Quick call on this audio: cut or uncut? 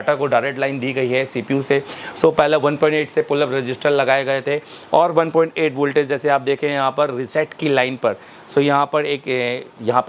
uncut